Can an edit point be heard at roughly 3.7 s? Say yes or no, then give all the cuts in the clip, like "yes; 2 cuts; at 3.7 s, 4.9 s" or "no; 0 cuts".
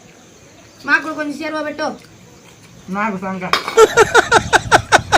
yes; 1 cut; at 3.7 s